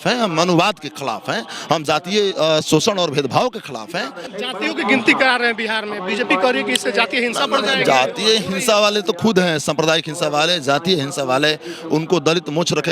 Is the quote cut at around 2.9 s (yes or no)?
no